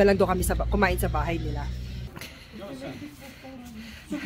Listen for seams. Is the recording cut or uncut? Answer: cut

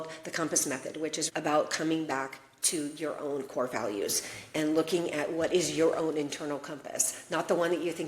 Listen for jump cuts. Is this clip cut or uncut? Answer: cut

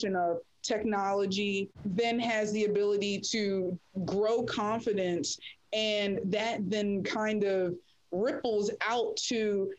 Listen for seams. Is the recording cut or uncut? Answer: cut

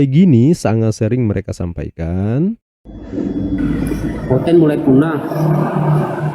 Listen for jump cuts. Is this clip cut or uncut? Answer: cut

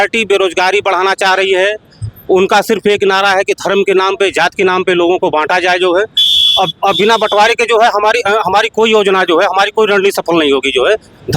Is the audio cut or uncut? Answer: uncut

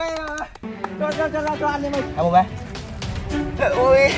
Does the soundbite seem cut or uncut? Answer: cut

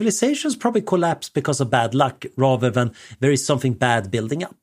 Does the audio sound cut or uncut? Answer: uncut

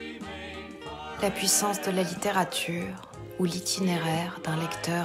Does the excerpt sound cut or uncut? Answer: uncut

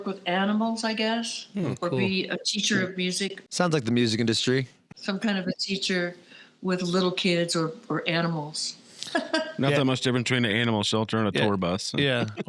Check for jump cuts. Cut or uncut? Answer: cut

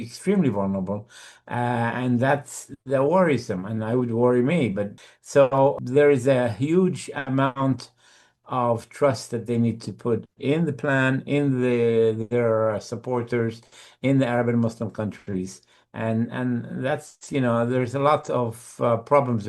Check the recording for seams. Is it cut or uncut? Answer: cut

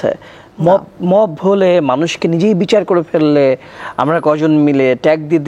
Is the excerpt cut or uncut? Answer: uncut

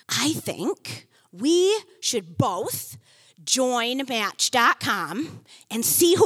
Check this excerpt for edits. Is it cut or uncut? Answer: uncut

